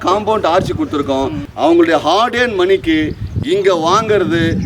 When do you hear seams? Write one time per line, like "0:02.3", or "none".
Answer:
0:01.4